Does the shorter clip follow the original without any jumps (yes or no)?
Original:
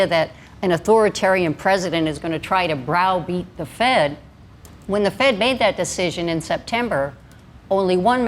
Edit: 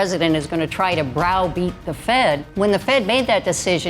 no